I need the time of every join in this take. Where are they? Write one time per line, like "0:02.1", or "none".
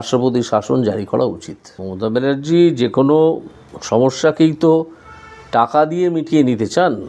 0:01.9